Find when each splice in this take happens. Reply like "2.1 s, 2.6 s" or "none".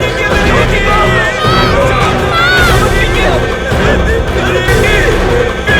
4.7 s

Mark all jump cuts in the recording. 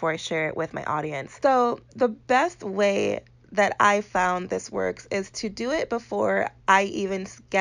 1.2 s

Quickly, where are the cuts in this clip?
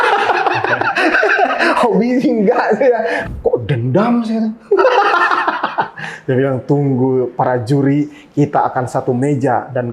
3.2 s

